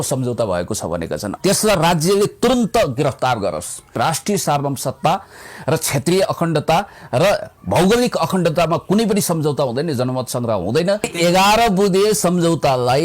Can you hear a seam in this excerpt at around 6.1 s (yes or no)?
no